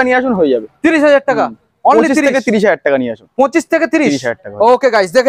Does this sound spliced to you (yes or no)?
no